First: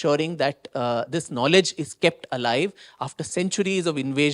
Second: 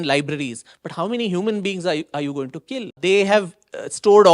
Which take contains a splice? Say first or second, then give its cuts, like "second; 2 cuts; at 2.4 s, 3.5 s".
second; 1 cut; at 3.0 s